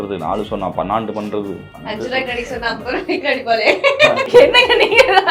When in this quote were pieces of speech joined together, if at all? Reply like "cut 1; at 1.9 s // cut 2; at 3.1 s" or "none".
cut 1; at 4.3 s